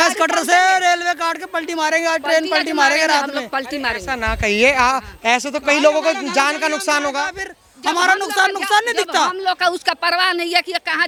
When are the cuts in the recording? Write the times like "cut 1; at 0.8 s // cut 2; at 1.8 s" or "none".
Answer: none

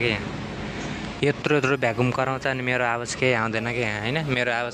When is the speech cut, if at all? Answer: none

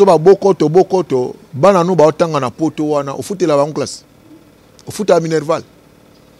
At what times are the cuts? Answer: none

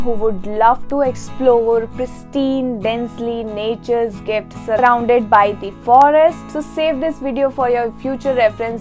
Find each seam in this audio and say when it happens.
none

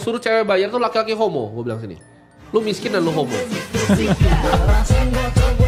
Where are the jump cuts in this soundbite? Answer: none

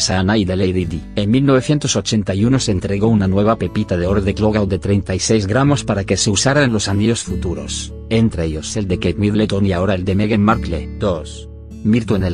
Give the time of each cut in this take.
cut 1; at 1.5 s

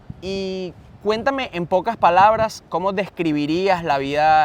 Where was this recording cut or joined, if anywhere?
none

